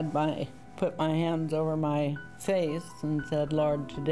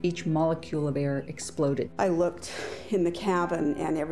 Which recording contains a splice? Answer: second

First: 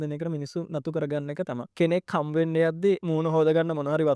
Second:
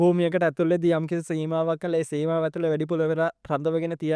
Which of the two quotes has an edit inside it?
first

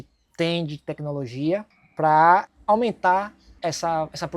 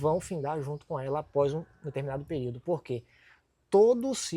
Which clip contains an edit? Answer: first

